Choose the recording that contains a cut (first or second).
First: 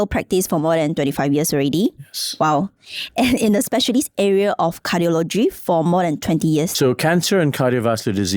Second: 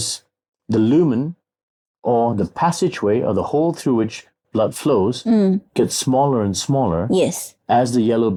first